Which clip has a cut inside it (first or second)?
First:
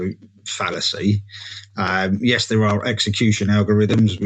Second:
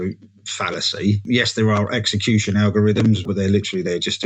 second